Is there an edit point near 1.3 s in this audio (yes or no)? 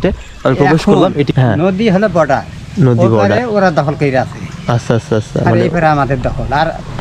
yes